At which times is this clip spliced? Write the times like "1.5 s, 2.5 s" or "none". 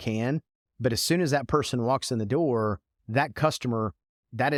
none

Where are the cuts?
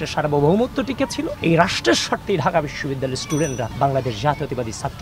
1.3 s, 3.7 s

